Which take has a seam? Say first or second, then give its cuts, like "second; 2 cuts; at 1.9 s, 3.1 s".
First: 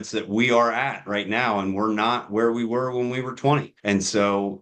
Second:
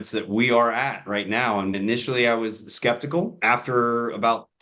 second; 2 cuts; at 1.7 s, 3.3 s